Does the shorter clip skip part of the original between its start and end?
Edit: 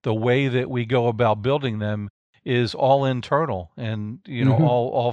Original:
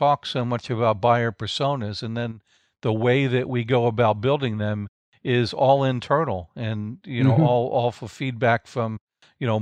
no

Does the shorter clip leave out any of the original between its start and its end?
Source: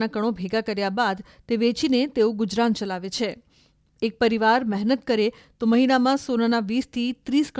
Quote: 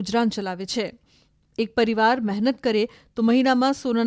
no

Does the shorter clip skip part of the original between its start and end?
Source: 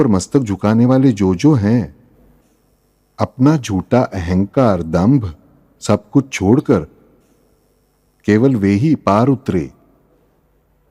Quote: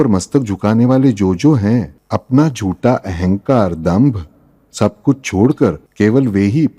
yes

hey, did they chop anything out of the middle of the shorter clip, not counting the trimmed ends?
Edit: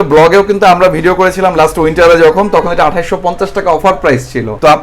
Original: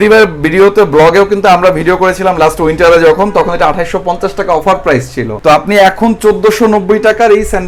no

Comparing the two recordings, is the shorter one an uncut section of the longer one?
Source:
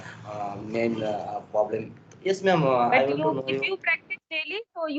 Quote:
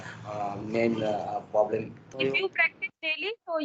no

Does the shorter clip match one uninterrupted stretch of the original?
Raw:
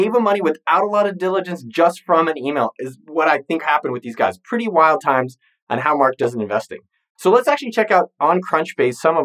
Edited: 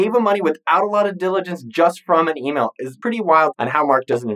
no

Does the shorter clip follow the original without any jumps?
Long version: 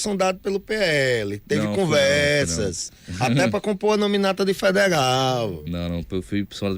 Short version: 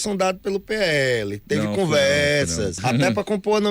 no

